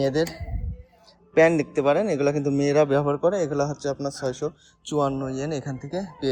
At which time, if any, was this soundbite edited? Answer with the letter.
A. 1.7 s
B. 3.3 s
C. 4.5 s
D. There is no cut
D